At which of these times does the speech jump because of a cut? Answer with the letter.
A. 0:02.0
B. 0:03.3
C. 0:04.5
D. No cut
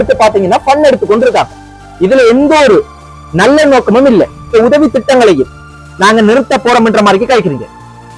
C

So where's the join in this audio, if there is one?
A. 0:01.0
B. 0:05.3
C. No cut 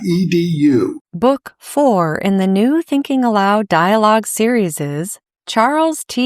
A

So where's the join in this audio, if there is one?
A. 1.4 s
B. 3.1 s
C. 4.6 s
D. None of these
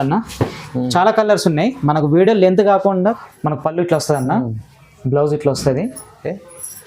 B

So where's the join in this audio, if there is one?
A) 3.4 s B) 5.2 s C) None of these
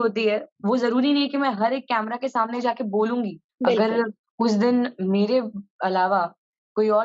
A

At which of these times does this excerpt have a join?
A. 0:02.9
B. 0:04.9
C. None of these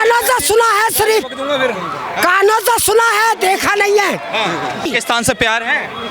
B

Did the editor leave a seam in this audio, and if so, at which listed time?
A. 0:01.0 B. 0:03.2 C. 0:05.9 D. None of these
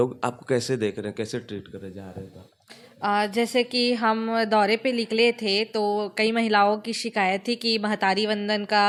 D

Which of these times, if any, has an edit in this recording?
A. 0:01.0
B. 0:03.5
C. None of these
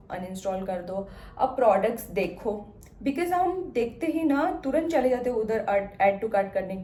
C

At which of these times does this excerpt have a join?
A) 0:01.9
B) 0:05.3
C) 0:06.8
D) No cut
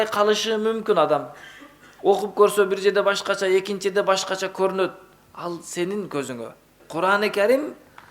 C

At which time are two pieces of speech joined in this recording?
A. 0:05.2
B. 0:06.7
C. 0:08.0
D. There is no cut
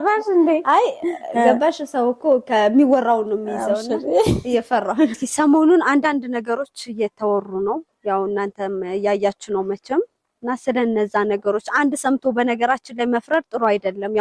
A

